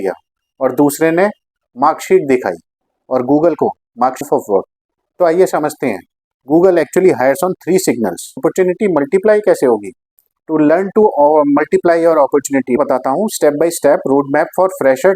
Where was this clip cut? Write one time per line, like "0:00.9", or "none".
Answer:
0:04.2
0:08.4
0:12.8

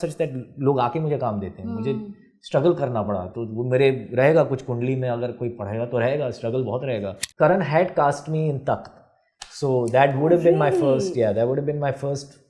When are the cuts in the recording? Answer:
0:07.2

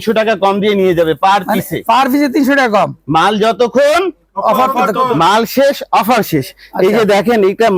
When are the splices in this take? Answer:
none

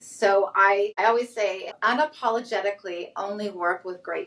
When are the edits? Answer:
0:01.7

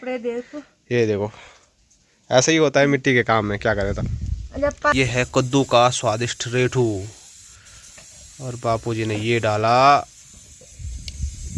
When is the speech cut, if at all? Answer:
0:04.9

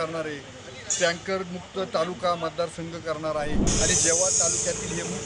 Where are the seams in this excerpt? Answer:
0:03.7

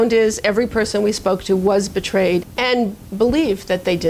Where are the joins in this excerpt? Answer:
0:02.4

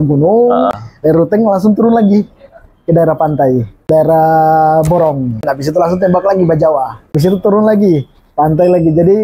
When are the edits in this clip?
0:00.7
0:03.9
0:05.5
0:07.1

